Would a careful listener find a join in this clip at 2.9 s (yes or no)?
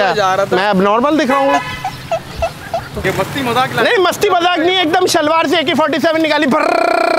yes